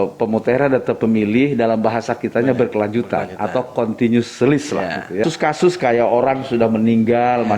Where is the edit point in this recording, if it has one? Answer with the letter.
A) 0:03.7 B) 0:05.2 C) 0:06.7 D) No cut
B